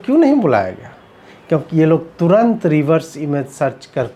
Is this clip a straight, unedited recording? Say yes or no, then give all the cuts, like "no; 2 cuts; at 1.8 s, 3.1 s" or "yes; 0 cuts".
yes; 0 cuts